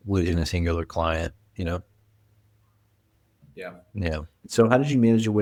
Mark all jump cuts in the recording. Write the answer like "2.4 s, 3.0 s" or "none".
none